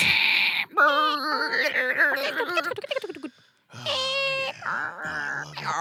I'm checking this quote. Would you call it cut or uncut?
uncut